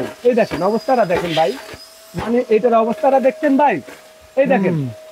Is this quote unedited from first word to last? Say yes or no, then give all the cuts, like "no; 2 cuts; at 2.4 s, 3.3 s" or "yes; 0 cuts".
yes; 0 cuts